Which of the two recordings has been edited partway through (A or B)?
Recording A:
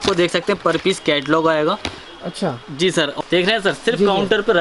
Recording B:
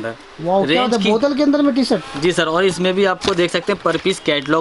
A